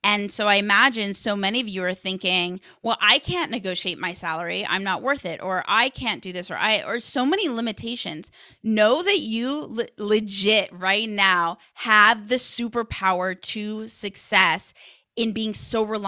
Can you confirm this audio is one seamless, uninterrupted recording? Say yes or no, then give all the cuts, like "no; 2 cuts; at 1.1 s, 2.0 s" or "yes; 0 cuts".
yes; 0 cuts